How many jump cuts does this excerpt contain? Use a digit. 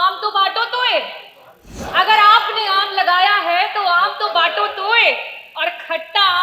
1